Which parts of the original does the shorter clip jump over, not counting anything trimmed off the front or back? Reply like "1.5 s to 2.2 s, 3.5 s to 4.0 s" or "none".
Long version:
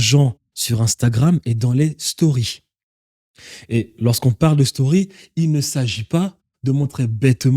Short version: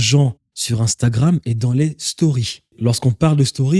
2.7 s to 3.9 s